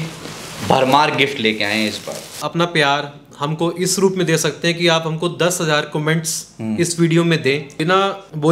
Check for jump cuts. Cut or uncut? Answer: cut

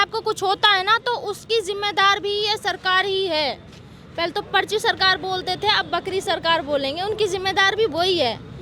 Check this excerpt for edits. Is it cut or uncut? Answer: uncut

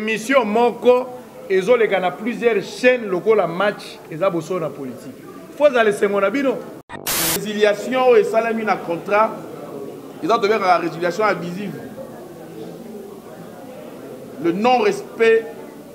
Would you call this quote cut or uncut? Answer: cut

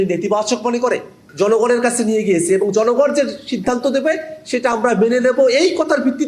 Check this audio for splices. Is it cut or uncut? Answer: cut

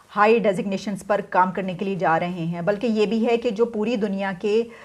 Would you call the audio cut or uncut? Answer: uncut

